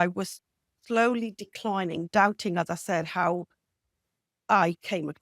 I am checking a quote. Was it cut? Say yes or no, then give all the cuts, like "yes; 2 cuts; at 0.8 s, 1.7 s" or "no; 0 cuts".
no; 0 cuts